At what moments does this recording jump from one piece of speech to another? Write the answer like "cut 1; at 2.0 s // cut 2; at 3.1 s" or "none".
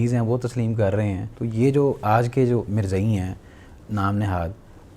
cut 1; at 1.3 s